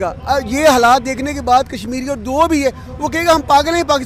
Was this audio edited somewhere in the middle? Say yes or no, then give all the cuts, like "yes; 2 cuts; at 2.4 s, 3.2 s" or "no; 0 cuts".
no; 0 cuts